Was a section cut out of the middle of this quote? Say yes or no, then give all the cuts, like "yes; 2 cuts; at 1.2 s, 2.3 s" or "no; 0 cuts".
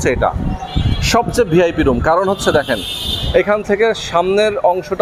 no; 0 cuts